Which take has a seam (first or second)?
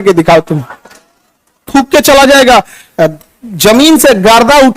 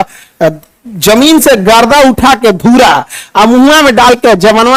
first